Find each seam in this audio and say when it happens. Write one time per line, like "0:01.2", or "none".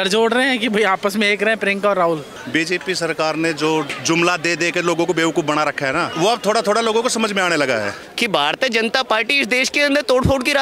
0:02.3
0:04.0
0:06.1
0:08.0